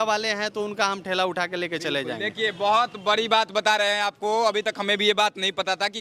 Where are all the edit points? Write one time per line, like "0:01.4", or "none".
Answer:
none

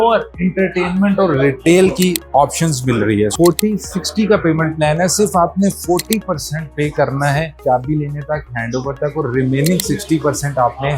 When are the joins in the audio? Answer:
0:03.3

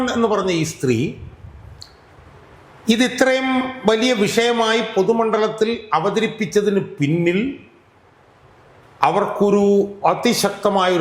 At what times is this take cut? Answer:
none

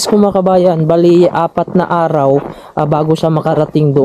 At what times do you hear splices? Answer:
none

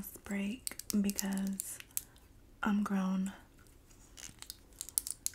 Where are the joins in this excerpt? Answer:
none

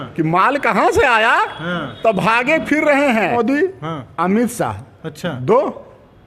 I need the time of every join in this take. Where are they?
0:03.2

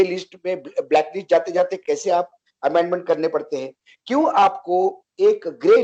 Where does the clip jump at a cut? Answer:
none

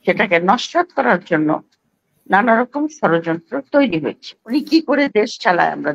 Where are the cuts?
0:04.3

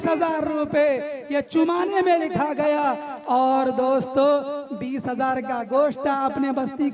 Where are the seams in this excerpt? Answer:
none

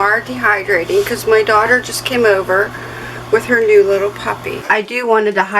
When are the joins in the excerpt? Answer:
0:04.6

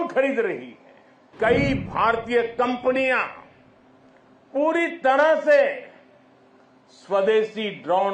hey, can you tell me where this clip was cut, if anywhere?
0:01.3

